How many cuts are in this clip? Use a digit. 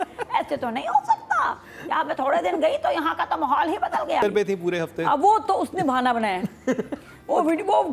1